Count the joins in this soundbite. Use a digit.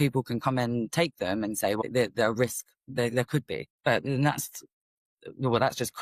2